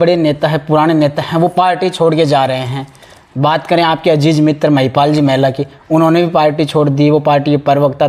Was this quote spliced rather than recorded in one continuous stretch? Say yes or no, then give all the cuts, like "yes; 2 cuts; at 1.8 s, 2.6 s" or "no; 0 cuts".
no; 0 cuts